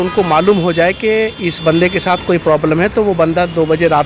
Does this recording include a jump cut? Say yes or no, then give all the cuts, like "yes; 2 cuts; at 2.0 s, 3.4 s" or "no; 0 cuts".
no; 0 cuts